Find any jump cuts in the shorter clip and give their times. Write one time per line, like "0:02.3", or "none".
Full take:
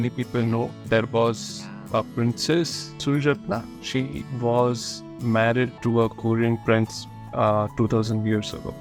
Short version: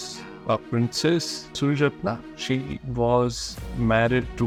none